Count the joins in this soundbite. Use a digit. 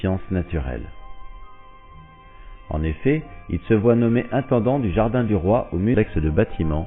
0